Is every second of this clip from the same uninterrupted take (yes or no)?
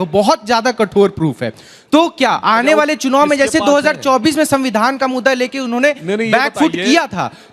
yes